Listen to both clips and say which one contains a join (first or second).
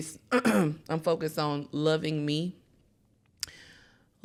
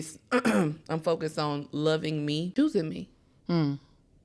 second